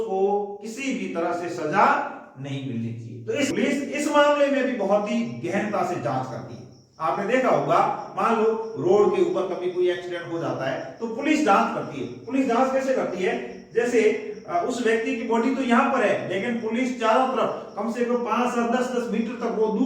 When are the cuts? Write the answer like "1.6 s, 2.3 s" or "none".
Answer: 3.5 s